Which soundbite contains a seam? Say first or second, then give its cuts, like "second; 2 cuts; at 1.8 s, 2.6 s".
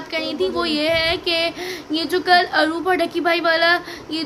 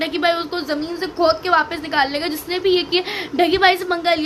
second; 1 cut; at 3.3 s